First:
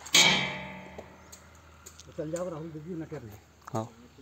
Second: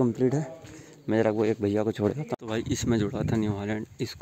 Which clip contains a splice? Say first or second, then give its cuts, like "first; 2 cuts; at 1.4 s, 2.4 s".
second; 1 cut; at 2.3 s